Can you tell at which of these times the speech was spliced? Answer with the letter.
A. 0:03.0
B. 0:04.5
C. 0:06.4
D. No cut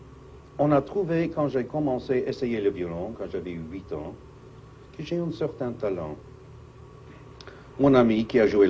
D